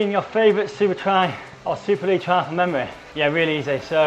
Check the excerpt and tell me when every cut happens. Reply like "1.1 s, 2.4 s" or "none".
1.5 s, 3.0 s